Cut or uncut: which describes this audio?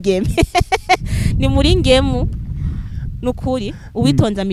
uncut